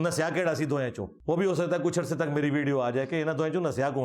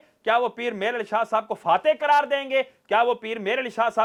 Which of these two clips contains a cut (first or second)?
first